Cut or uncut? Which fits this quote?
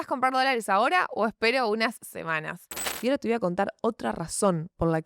cut